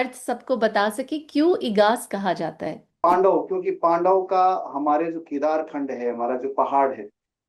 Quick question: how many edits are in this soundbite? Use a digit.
1